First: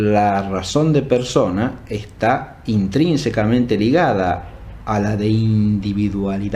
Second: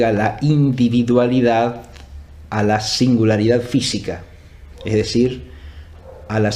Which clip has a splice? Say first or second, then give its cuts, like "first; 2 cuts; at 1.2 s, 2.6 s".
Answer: first; 1 cut; at 4.2 s